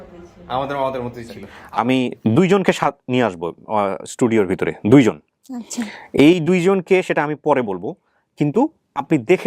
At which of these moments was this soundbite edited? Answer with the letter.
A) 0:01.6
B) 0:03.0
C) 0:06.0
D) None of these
A